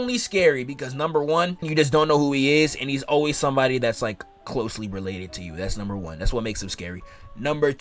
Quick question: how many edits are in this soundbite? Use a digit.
1